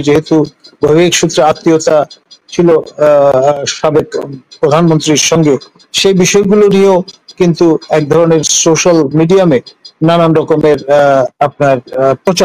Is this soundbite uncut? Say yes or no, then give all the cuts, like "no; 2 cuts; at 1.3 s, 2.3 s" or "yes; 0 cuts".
yes; 0 cuts